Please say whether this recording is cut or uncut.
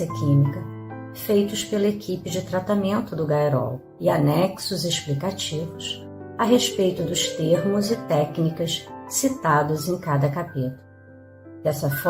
uncut